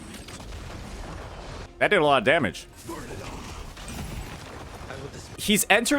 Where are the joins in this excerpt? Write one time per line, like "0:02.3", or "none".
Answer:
0:01.7
0:02.7